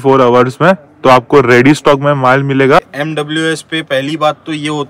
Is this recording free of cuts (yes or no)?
no